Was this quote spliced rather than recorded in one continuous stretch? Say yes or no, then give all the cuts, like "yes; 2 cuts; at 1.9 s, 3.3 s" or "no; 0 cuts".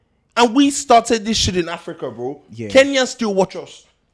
no; 0 cuts